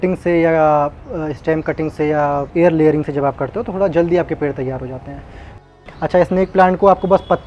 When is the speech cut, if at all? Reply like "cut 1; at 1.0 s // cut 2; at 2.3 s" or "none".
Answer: cut 1; at 5.6 s